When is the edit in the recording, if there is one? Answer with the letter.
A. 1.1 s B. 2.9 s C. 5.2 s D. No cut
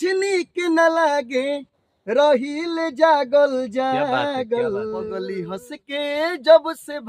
C